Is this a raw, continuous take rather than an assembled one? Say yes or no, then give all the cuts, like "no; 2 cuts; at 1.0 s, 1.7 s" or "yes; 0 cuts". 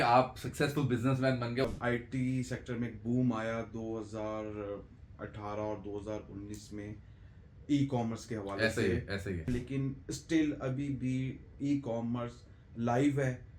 no; 2 cuts; at 1.6 s, 9.5 s